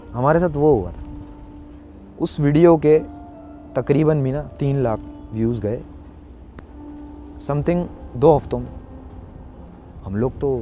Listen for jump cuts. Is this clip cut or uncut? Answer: uncut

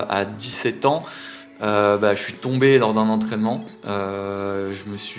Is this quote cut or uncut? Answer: uncut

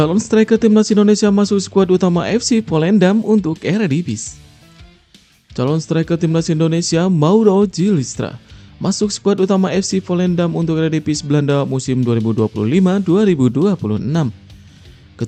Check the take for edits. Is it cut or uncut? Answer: uncut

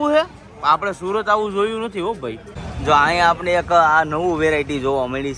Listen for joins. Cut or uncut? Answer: cut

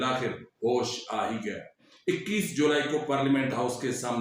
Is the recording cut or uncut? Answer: cut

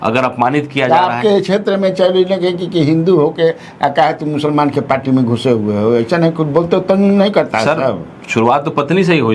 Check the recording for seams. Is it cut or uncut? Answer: uncut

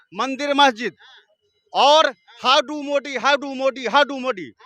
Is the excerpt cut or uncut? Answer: uncut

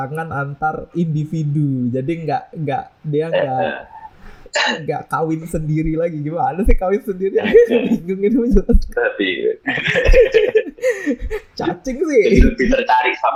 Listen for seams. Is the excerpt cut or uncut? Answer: uncut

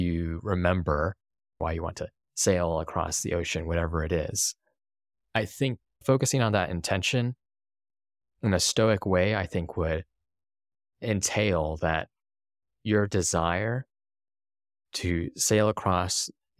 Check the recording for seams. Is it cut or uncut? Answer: cut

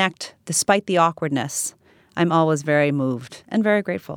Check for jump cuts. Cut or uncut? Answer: uncut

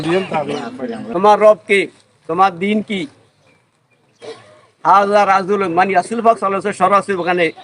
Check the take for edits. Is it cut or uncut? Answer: cut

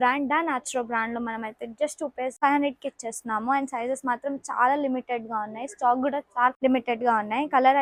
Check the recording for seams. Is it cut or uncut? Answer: uncut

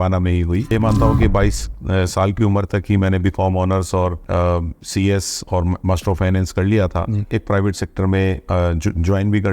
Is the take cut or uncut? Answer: cut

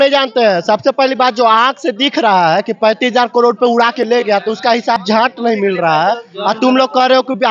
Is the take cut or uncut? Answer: uncut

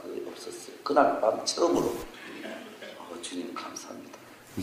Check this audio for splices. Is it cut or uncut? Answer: cut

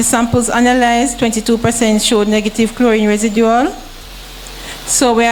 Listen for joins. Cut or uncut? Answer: uncut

